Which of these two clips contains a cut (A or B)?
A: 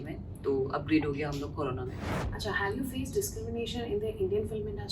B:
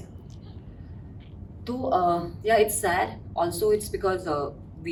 A